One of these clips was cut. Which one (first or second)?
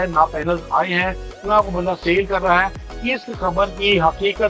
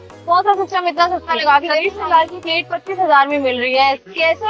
second